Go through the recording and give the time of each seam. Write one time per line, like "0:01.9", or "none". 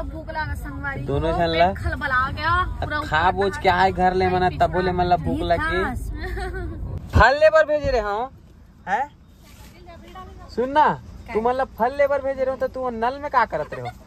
0:06.9